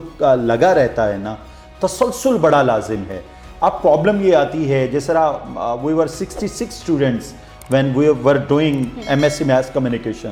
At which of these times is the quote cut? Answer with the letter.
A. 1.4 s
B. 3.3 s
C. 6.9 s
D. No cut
D